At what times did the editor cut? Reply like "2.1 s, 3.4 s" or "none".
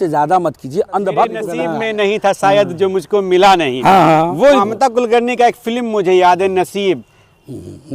1.6 s, 4.4 s